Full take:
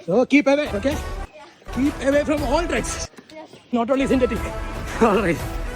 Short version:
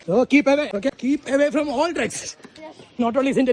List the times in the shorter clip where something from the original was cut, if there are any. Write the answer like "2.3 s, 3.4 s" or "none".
1.0 s